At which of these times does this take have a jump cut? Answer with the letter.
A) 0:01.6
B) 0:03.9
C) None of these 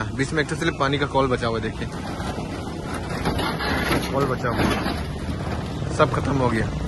C